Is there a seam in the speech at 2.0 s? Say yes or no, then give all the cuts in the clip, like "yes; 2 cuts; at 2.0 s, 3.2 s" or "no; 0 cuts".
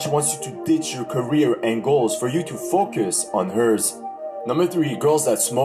no; 1 cut; at 3.9 s